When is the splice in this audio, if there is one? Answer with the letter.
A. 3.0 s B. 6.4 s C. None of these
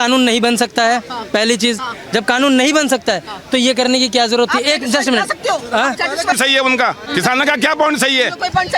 B